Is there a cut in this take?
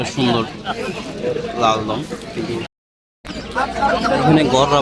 yes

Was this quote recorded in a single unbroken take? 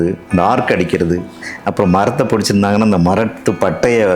yes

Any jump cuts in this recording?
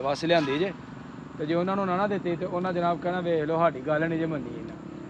no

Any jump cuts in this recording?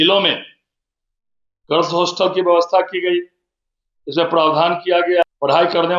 no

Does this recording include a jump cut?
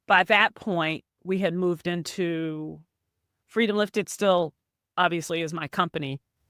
no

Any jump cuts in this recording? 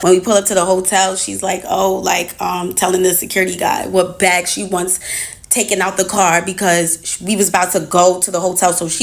no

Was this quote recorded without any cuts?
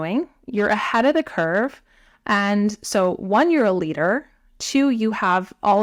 yes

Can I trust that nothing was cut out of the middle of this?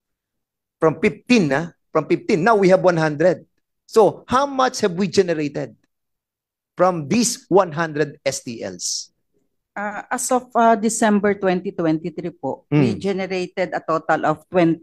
yes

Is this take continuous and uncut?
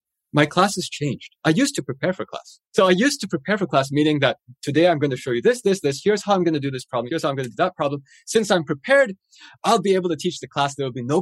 no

